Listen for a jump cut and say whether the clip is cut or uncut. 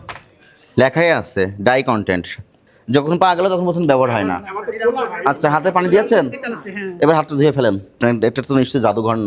cut